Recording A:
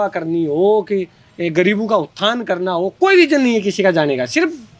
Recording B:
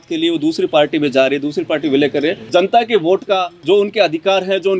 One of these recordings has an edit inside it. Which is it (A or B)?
B